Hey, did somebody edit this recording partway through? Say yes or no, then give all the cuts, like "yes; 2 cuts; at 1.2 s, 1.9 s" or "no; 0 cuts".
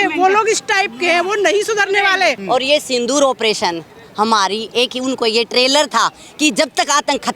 yes; 1 cut; at 2.4 s